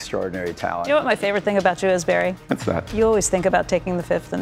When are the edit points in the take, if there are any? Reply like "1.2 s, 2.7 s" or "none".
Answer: 0.9 s, 2.5 s